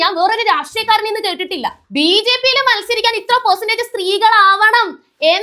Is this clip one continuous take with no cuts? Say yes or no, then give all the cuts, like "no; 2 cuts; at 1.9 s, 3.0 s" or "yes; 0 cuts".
no; 1 cut; at 1.8 s